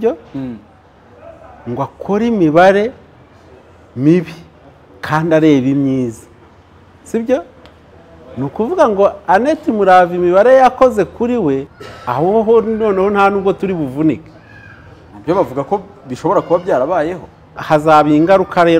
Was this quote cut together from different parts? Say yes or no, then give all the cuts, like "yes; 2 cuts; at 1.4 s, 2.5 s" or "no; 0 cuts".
yes; 1 cut; at 11.8 s